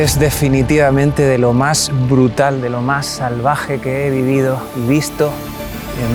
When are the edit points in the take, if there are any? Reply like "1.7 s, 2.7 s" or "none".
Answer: none